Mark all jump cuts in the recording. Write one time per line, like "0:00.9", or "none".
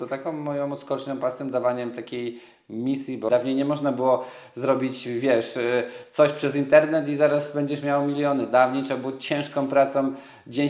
0:03.3